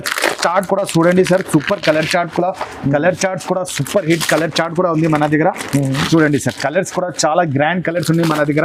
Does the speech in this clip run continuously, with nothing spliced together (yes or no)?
yes